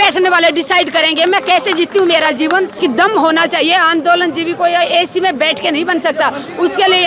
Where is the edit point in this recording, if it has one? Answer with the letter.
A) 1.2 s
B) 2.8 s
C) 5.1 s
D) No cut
B